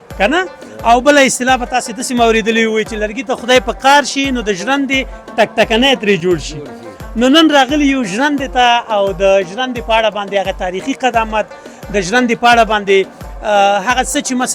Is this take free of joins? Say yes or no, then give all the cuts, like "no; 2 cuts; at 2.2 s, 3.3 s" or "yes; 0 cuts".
yes; 0 cuts